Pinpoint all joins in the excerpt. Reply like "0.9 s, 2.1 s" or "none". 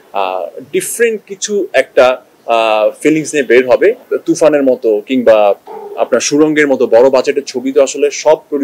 4.1 s